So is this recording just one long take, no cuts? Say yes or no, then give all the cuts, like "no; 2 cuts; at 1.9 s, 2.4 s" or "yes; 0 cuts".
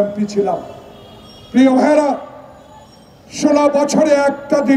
yes; 0 cuts